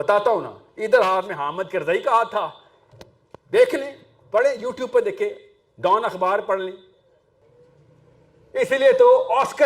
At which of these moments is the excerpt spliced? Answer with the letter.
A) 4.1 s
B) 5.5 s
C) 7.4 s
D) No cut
C